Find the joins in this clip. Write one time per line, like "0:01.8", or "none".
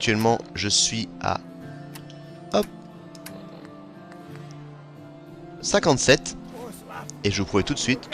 0:04.4